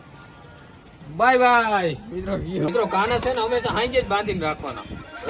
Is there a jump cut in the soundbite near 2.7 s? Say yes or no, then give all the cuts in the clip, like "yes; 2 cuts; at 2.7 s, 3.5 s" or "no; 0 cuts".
yes; 1 cut; at 2.7 s